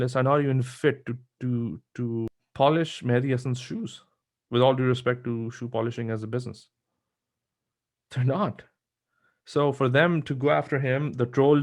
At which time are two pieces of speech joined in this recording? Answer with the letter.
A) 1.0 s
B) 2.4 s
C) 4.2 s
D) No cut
B